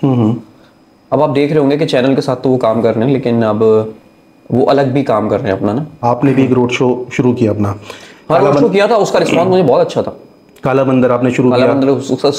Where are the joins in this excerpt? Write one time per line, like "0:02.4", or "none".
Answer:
0:06.0